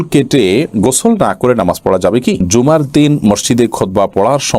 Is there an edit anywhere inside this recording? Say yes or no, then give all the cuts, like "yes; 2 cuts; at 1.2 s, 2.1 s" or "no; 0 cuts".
yes; 1 cut; at 2.5 s